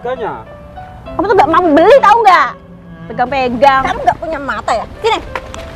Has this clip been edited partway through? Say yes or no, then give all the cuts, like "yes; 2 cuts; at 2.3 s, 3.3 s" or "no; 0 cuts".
yes; 1 cut; at 3.9 s